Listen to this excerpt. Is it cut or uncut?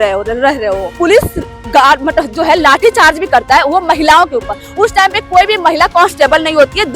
cut